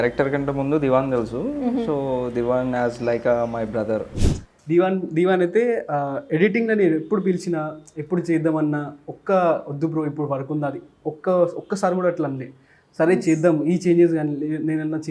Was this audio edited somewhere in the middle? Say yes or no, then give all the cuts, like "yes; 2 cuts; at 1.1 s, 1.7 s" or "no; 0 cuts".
yes; 1 cut; at 4.2 s